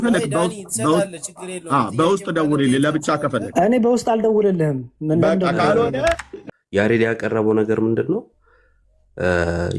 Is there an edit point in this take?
yes; 1 cut; at 6.4 s

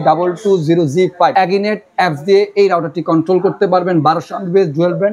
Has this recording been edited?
yes; 1 cut; at 1.3 s

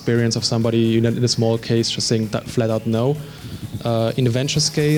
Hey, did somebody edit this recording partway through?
no; 0 cuts

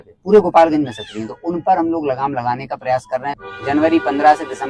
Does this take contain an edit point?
yes; 1 cut; at 3.5 s

